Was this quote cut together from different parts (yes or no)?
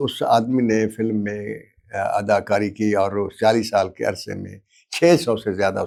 no